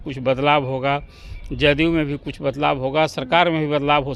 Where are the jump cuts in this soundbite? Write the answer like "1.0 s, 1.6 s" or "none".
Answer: none